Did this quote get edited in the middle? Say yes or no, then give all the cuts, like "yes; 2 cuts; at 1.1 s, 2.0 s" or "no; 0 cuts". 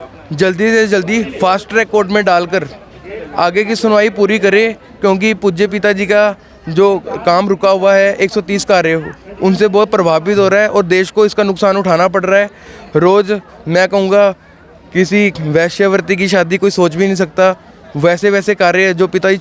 no; 0 cuts